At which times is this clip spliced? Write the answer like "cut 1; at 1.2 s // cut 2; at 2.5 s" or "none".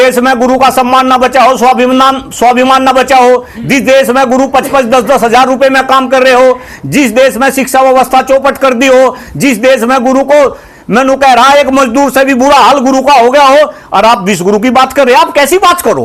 none